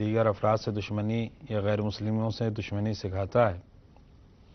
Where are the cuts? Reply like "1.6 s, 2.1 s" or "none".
1.4 s